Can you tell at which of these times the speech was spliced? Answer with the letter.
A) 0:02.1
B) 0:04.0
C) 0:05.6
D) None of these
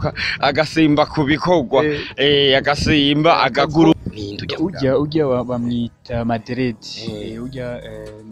B